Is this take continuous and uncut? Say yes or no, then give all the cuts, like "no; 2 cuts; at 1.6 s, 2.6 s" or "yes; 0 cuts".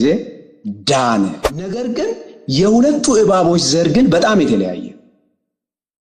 no; 1 cut; at 1.8 s